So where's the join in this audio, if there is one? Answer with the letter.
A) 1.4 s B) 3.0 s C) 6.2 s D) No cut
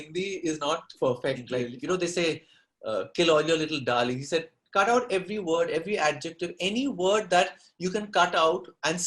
A